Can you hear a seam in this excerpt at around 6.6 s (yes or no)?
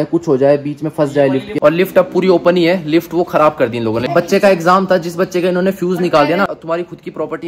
yes